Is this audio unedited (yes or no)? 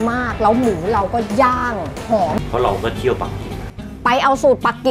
no